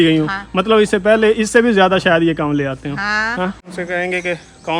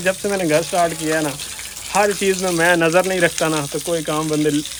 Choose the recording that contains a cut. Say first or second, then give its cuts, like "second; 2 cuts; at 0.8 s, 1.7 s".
first; 1 cut; at 3.7 s